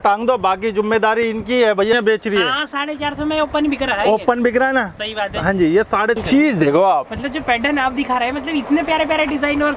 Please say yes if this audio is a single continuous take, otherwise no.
no